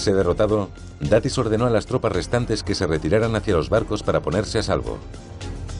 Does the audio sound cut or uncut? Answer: uncut